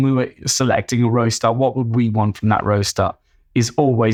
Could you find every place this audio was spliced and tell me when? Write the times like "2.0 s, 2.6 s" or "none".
none